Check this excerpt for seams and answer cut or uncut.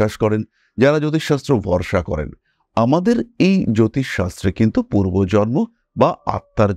uncut